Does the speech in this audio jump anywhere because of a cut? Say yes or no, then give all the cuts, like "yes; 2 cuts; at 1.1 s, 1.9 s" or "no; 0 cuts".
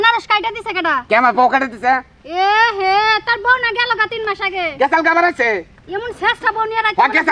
no; 0 cuts